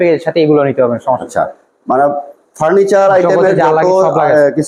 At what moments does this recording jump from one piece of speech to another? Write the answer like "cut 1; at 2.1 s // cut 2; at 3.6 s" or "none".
none